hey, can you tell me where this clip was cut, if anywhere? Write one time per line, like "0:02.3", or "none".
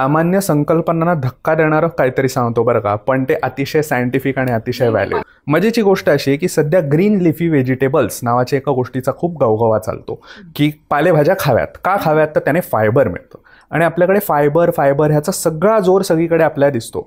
0:05.2